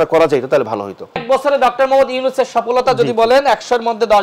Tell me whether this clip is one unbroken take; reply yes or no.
no